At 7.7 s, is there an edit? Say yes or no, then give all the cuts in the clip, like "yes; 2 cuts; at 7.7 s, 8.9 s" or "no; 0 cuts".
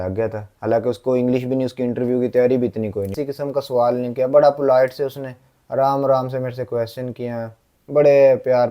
no; 1 cut; at 3.2 s